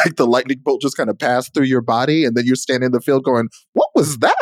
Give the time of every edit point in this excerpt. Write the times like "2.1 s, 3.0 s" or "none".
none